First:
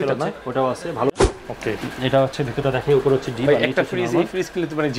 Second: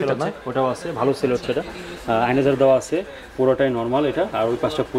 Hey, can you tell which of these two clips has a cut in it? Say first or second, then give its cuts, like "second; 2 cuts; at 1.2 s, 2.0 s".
first; 1 cut; at 1.2 s